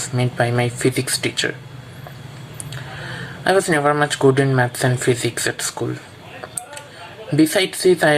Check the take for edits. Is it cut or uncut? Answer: uncut